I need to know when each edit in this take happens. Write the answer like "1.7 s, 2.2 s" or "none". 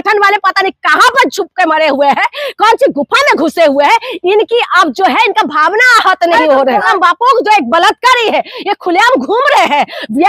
6.9 s